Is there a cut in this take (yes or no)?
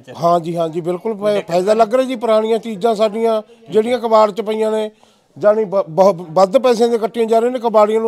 no